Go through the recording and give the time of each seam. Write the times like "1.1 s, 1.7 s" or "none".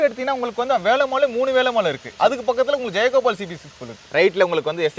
2.1 s, 4.0 s